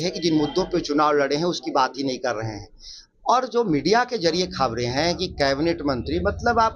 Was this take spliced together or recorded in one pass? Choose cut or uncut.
uncut